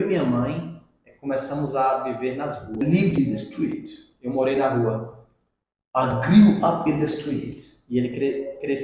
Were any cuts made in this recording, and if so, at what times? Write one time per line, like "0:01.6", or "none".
0:02.8